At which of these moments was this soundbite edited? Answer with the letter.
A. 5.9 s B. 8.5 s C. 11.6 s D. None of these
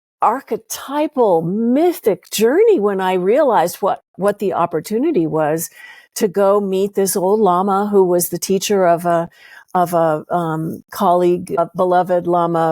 C